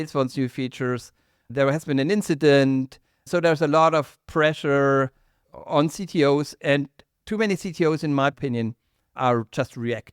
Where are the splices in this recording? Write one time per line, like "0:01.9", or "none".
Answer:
none

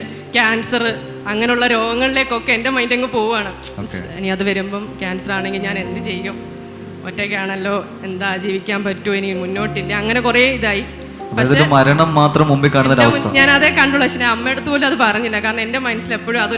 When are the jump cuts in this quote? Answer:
none

